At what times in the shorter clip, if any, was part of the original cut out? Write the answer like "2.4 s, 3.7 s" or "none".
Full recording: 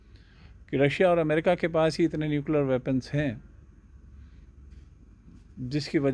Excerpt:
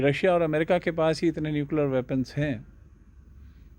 none